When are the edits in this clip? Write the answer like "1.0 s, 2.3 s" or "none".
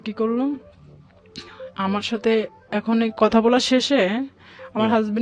none